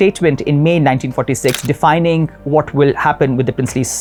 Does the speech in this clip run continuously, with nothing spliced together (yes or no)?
yes